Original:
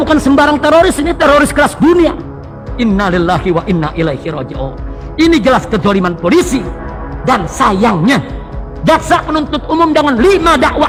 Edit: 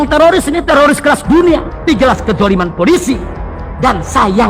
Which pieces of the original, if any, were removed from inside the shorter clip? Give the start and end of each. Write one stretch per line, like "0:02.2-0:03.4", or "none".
0:02.4-0:05.3